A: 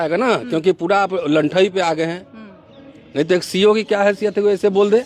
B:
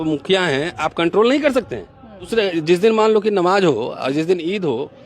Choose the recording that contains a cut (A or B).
B